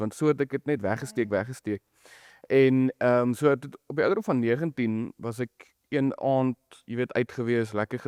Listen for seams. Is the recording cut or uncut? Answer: uncut